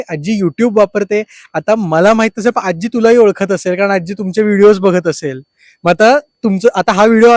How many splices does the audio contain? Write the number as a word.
zero